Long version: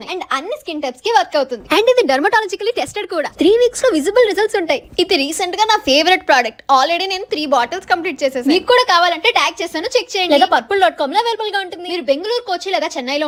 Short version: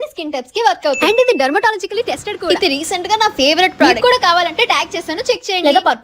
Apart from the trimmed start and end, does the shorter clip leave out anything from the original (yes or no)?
yes